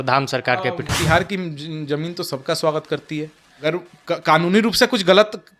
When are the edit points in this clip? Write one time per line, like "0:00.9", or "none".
0:01.0
0:03.6